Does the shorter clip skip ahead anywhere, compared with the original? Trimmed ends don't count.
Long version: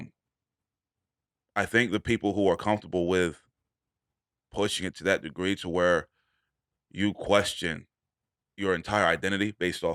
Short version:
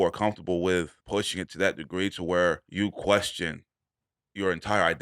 yes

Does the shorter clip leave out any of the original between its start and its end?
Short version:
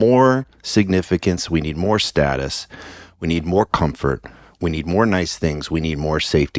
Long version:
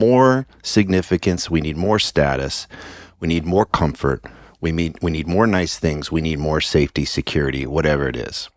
yes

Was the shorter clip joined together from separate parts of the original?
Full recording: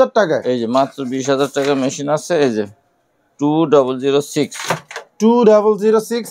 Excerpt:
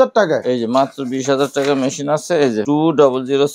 yes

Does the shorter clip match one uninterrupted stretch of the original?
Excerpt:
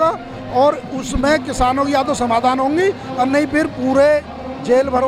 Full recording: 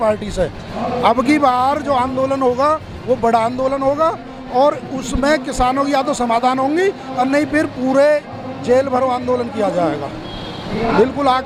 yes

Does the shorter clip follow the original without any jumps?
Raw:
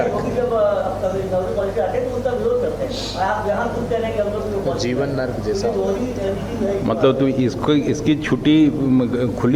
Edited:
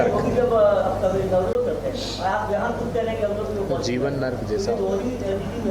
no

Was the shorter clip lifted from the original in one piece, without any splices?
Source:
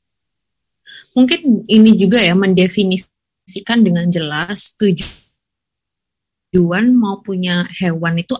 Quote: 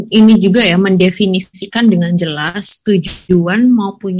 no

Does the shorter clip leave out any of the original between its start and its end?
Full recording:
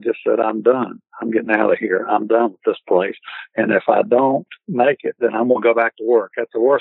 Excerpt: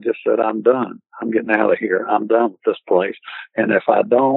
no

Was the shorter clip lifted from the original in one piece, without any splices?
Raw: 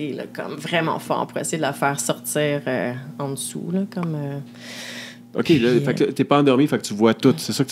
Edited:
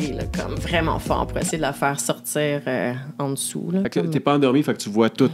no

